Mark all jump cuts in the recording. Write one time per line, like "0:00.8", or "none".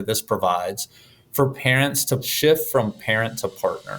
0:02.3